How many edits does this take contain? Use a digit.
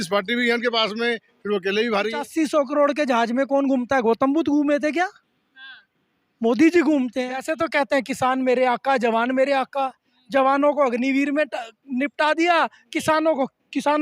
2